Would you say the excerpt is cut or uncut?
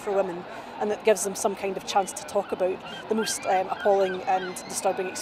uncut